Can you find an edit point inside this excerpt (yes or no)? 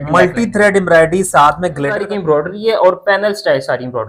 yes